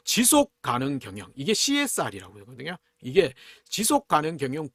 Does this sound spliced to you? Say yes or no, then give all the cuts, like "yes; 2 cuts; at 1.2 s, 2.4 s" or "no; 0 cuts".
no; 0 cuts